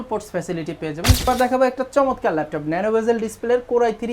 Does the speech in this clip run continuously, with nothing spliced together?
no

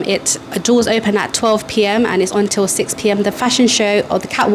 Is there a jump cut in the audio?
no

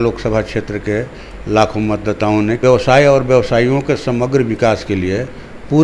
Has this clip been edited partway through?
yes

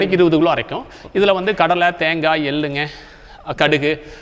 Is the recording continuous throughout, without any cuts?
yes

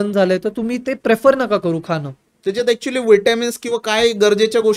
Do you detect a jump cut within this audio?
no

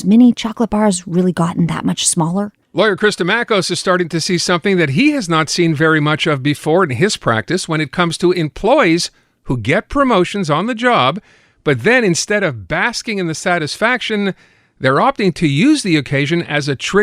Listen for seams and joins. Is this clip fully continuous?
no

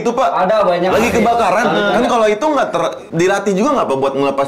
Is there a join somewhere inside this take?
yes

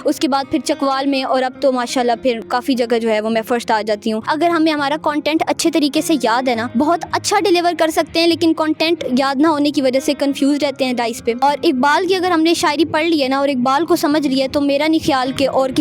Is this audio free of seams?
no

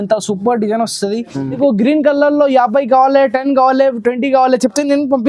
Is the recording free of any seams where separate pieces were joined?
no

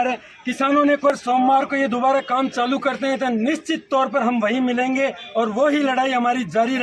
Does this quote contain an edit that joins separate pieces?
yes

